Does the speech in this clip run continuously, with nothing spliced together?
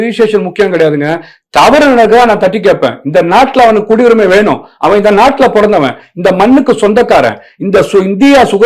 yes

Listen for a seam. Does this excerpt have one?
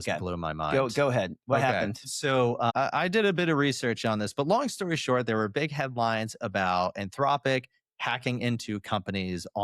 no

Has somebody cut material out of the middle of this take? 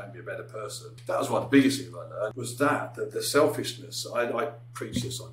yes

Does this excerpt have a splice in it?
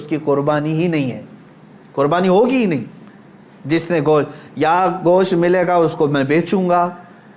no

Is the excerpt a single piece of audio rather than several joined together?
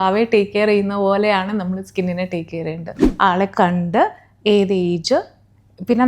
no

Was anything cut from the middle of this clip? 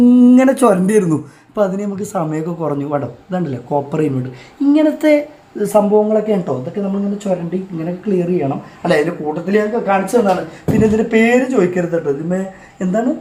no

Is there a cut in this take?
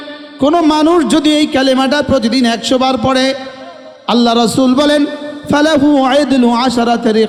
no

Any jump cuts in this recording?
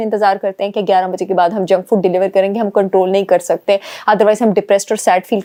no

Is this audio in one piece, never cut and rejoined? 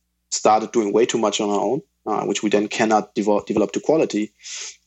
yes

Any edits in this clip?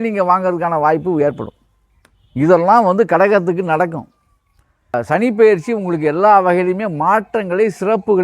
yes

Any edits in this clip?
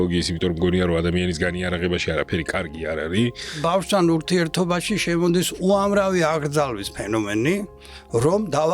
yes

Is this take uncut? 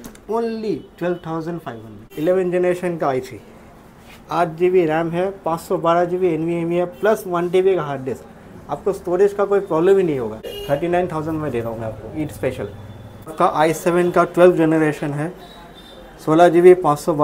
no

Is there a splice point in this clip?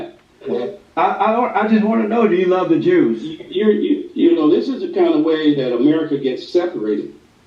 no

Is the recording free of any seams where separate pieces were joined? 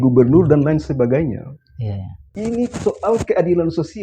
no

